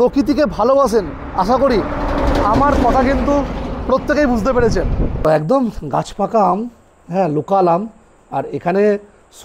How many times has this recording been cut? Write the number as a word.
one